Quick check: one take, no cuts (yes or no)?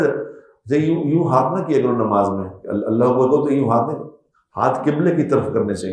yes